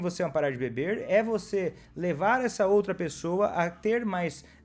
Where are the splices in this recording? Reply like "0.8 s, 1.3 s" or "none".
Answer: none